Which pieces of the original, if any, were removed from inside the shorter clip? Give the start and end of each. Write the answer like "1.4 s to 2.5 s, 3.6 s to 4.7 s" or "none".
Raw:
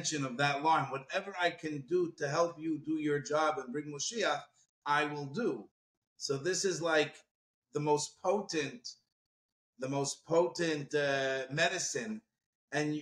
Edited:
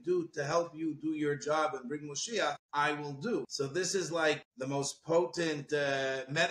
4.5 s to 4.8 s, 5.6 s to 6.2 s, 7.2 s to 9.7 s

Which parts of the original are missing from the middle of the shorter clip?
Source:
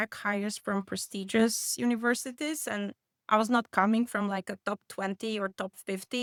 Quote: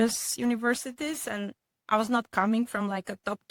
none

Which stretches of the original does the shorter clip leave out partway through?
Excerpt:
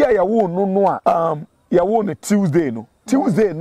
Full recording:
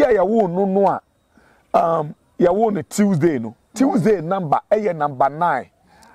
1.0 s to 1.7 s

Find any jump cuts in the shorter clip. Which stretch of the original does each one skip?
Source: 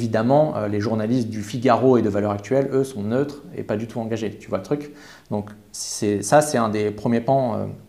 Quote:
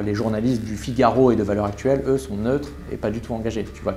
none

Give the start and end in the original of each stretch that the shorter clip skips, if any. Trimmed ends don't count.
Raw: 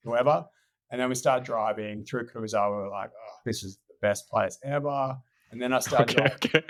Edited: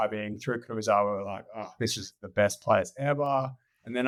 none

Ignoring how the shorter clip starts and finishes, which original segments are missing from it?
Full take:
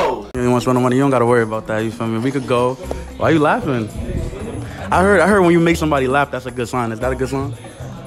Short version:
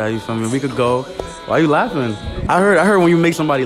4.0 s to 4.7 s

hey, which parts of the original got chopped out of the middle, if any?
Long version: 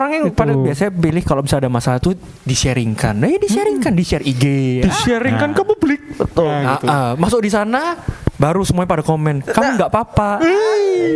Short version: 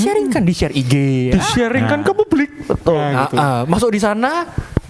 none

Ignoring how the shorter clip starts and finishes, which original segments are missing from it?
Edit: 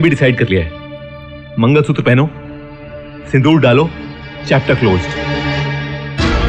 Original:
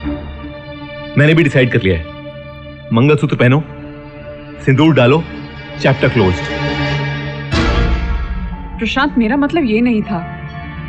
none

